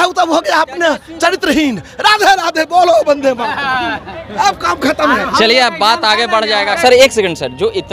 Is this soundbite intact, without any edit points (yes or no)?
no